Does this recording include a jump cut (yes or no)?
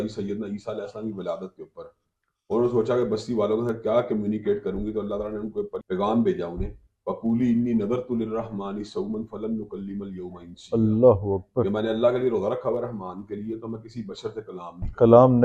yes